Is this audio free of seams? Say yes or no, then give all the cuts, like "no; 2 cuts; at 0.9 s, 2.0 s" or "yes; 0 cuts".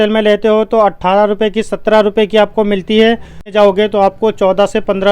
no; 1 cut; at 3.4 s